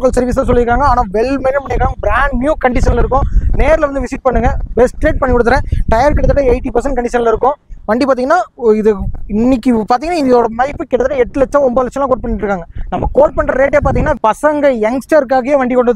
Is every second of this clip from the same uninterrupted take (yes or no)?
no